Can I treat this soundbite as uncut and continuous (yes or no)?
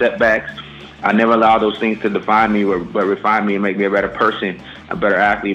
yes